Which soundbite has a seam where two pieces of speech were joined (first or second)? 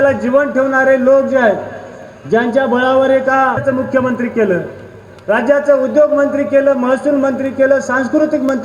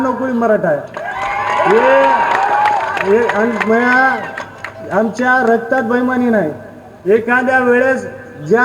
first